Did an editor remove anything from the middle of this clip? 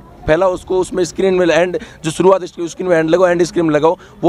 no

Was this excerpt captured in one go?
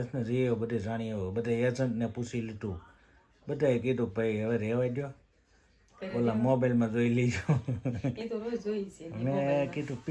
yes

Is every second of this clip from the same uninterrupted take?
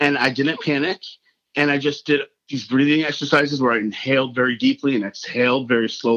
no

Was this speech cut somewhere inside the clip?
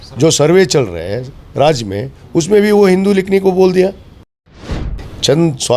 yes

